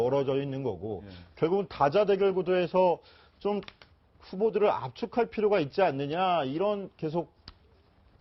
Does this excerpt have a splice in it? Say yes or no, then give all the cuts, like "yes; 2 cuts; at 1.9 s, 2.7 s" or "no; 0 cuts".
no; 0 cuts